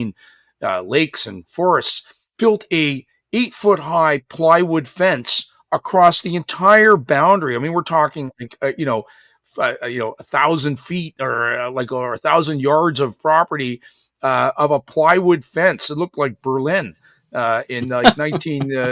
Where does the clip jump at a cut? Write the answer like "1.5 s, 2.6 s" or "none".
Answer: none